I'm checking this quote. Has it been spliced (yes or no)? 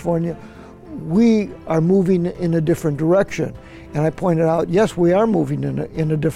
no